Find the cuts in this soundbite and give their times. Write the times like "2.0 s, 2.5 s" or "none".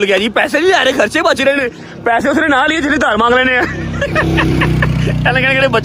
none

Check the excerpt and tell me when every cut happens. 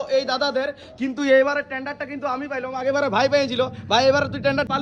none

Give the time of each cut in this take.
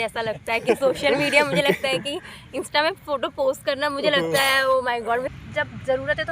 5.3 s

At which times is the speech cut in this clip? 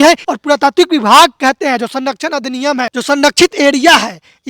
2.9 s

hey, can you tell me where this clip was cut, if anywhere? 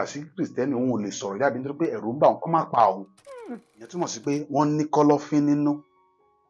3.4 s

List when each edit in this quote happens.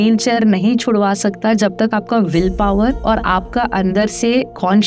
none

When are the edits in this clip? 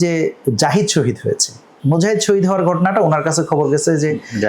1.8 s

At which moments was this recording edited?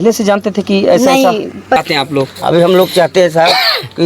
1.8 s

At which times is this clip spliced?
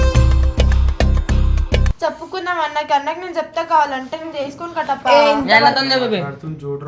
1.9 s

